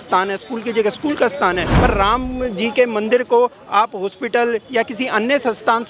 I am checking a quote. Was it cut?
yes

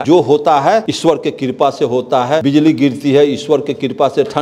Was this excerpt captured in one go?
no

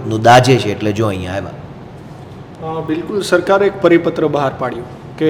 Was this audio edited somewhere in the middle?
no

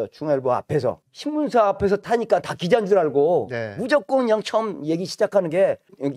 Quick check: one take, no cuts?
no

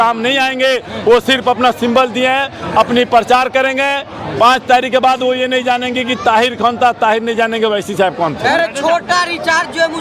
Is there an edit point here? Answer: no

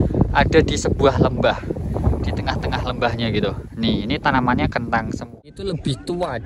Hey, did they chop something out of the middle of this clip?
yes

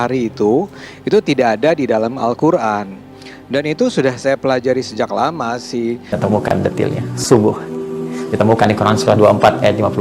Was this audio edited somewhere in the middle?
yes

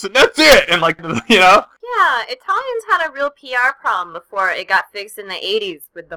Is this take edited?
yes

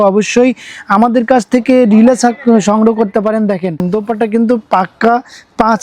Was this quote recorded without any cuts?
no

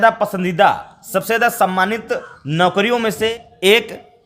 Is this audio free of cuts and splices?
no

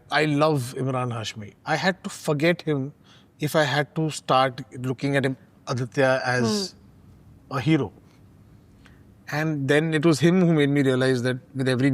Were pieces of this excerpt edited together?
no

